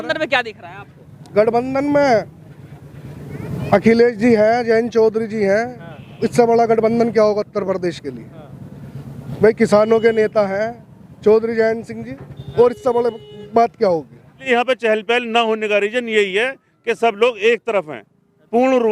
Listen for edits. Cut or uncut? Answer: cut